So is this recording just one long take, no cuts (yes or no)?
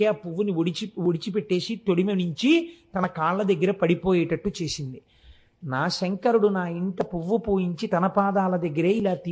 yes